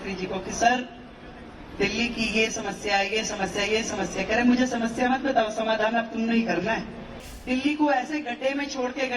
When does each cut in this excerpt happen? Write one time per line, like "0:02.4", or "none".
0:07.2